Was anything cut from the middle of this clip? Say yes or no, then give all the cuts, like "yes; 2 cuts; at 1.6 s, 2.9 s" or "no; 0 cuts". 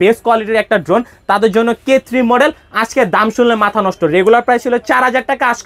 no; 0 cuts